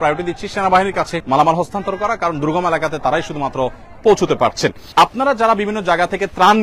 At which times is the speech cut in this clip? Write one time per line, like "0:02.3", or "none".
0:01.2
0:04.8